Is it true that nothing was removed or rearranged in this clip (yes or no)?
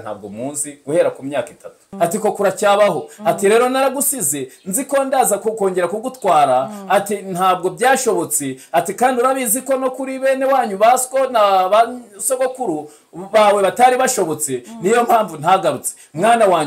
no